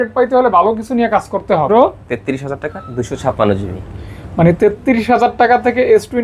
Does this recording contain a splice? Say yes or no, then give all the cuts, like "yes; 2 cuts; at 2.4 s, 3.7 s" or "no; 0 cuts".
yes; 1 cut; at 1.7 s